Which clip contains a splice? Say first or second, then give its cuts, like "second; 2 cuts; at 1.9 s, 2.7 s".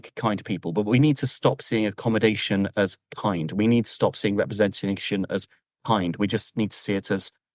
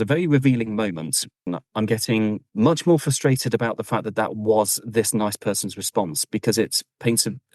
second; 2 cuts; at 1.5 s, 2.5 s